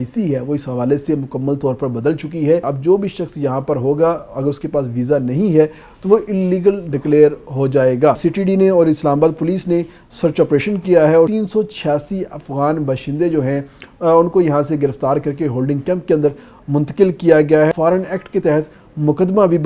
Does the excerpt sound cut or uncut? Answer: cut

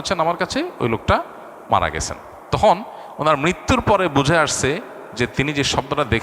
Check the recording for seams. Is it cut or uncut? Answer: uncut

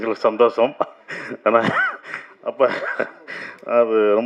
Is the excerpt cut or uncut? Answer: uncut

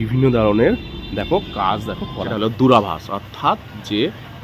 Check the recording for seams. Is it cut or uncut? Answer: cut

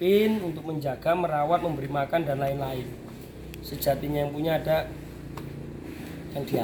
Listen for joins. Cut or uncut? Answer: uncut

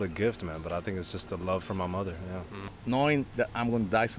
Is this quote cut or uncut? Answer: cut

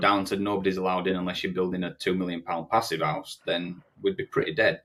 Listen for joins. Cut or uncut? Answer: uncut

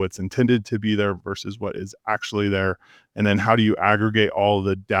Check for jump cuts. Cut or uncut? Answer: uncut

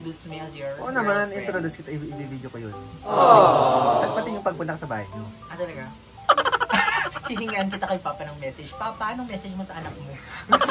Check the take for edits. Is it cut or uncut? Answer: uncut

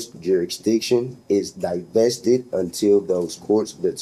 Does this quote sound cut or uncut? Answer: uncut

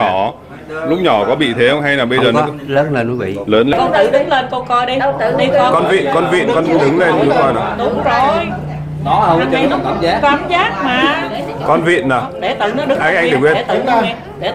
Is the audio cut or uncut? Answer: cut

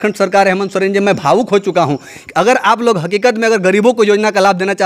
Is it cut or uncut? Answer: uncut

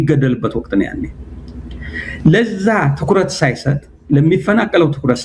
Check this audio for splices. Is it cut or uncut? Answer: uncut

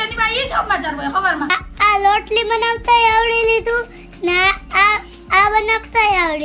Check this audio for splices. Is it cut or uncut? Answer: cut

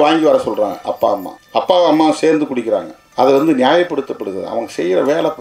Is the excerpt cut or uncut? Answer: cut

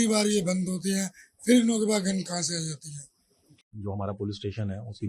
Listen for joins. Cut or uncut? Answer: cut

